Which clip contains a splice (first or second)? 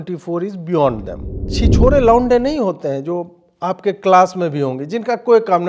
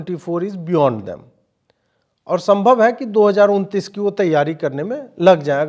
first